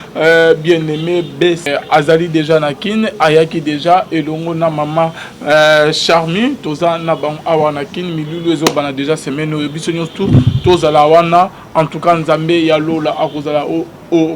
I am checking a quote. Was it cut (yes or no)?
yes